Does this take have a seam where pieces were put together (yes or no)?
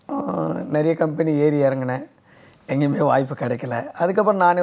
no